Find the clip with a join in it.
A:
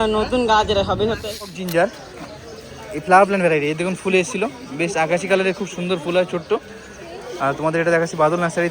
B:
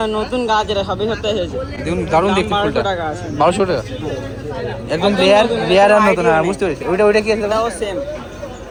A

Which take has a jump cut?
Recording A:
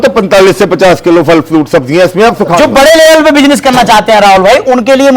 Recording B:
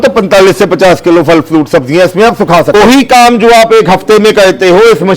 B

